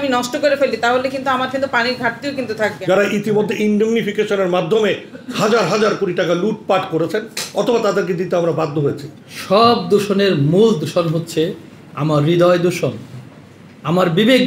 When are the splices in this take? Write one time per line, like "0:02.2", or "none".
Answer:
0:02.8
0:09.1